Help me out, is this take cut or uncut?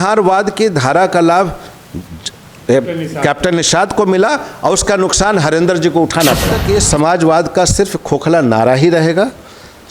cut